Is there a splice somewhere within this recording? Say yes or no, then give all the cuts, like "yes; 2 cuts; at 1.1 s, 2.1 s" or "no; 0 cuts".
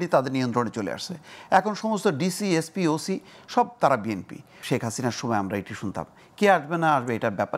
yes; 1 cut; at 4.5 s